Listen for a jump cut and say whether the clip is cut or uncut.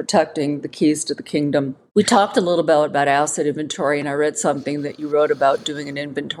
cut